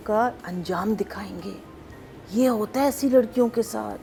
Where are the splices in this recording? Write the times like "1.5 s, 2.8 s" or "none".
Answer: none